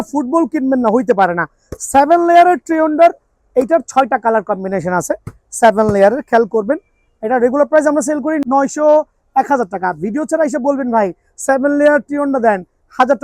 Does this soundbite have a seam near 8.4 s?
yes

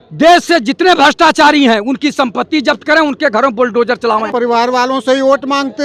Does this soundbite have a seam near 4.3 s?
no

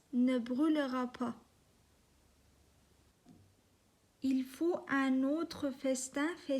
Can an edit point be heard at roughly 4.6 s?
no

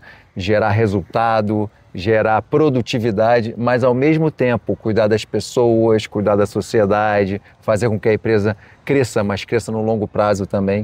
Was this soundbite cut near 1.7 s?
no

